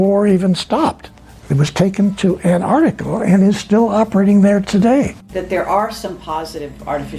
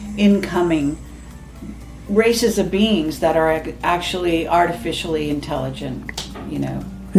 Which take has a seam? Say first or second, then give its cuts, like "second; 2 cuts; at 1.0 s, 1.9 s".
first; 1 cut; at 5.2 s